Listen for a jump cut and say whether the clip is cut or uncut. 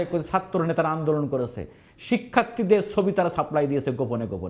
uncut